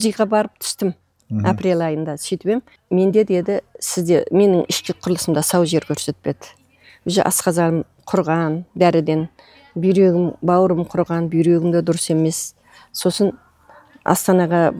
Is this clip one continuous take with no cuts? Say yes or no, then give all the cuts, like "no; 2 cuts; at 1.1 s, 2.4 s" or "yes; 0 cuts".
yes; 0 cuts